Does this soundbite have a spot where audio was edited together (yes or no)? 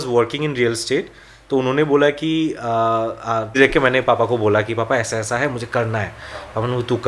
yes